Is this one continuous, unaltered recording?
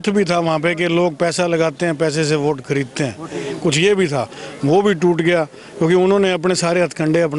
yes; 0 cuts

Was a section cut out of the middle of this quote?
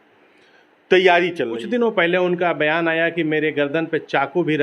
yes; 1 cut; at 1.5 s

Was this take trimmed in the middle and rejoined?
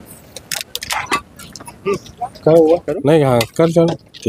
yes; 1 cut; at 1.1 s

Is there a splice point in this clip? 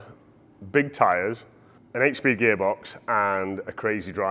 no; 0 cuts

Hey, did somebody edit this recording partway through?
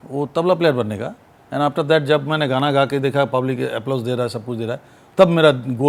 no; 0 cuts

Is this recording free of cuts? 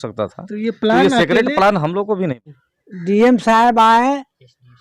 no; 1 cut; at 2.4 s

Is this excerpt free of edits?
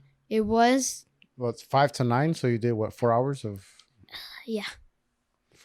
yes; 0 cuts

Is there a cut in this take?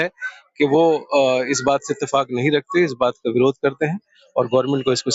no; 0 cuts

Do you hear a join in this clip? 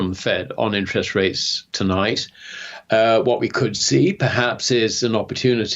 no; 0 cuts

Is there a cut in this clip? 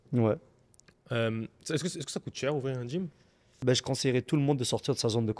yes; 1 cut; at 3.5 s

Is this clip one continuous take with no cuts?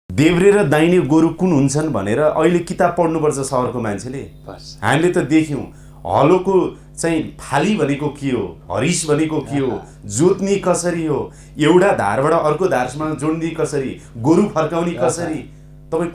yes; 0 cuts

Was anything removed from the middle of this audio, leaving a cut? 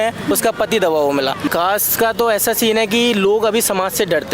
yes; 1 cut; at 1.5 s

